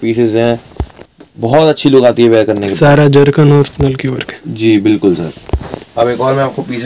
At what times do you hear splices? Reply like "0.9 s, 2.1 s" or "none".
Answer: none

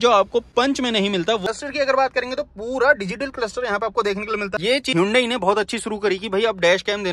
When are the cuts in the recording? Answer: 1.5 s, 4.5 s

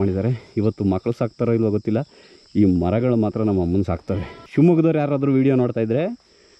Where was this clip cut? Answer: 4.3 s

